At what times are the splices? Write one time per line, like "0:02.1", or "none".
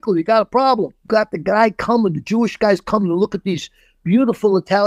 0:01.0